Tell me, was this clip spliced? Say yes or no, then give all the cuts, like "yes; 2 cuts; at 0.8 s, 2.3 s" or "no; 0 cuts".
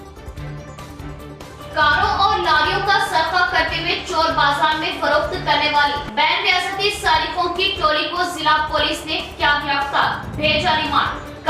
no; 0 cuts